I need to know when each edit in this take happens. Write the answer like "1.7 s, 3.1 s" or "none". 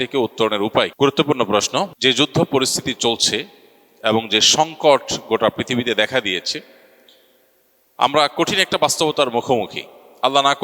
none